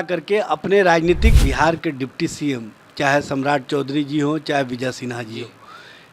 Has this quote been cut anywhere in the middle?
yes; 1 cut; at 1.4 s

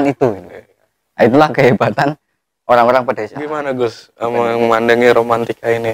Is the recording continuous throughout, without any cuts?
no; 1 cut; at 3.5 s

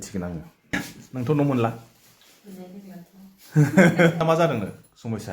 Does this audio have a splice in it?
yes; 2 cuts; at 0.8 s, 4.2 s

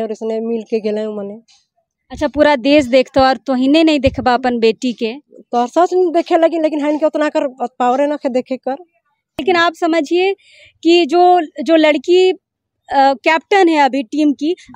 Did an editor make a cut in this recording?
yes; 1 cut; at 9.4 s

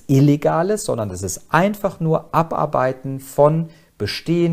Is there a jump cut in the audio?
no; 0 cuts

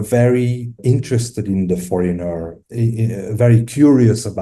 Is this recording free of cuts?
no; 2 cuts; at 0.8 s, 2.5 s

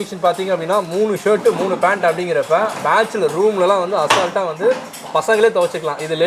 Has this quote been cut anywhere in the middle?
no; 0 cuts

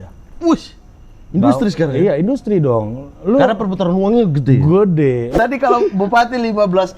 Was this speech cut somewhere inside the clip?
yes; 1 cut; at 5.3 s

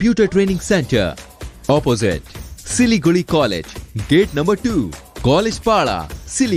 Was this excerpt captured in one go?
yes; 0 cuts

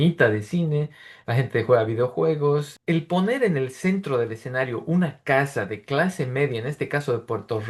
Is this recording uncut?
no; 1 cut; at 2.7 s

